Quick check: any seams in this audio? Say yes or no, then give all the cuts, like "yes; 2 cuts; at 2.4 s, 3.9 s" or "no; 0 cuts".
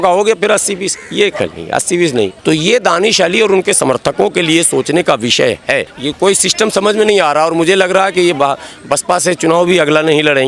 yes; 2 cuts; at 2.3 s, 6.0 s